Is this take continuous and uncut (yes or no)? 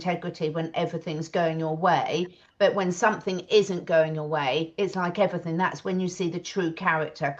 yes